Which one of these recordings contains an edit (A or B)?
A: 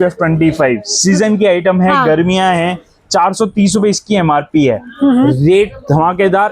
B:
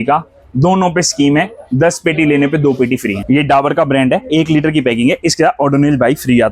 B